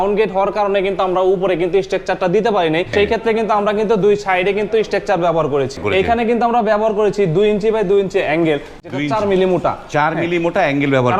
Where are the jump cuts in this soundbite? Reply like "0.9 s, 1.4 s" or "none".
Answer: 2.9 s, 5.8 s